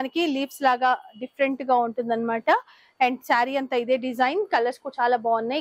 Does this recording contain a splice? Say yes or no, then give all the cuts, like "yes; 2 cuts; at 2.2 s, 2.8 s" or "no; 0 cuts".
no; 0 cuts